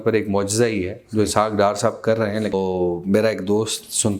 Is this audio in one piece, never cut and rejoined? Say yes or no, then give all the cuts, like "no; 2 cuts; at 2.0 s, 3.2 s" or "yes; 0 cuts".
no; 1 cut; at 2.5 s